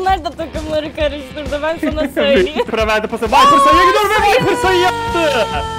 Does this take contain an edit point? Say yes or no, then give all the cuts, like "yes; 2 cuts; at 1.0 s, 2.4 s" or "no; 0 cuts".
yes; 1 cut; at 2.7 s